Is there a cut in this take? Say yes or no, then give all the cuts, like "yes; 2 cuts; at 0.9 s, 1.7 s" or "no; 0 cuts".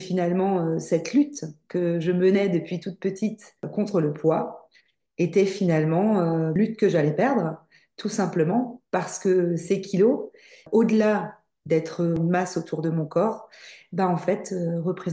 yes; 4 cuts; at 3.6 s, 6.5 s, 10.6 s, 12.2 s